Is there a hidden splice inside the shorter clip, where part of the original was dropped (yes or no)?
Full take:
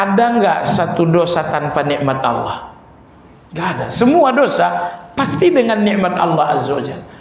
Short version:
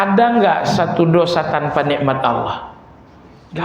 no